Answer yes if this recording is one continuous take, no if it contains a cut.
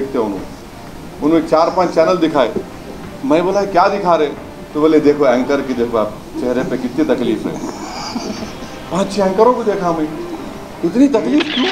no